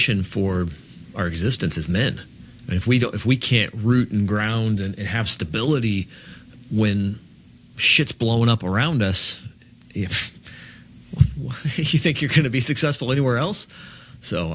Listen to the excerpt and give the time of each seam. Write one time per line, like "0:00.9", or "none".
none